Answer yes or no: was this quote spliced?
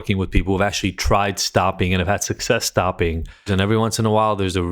yes